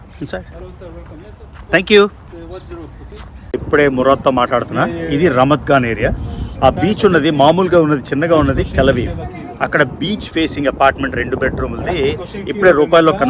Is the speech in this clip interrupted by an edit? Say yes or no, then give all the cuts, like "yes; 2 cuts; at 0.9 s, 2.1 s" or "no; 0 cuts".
yes; 1 cut; at 3.5 s